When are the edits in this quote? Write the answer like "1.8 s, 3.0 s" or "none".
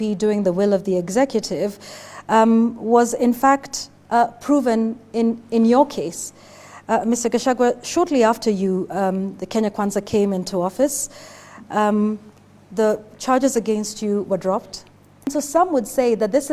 15.3 s